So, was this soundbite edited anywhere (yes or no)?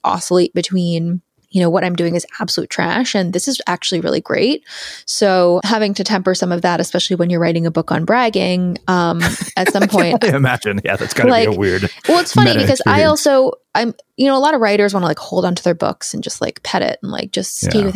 yes